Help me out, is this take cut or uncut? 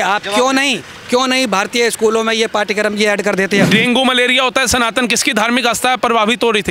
cut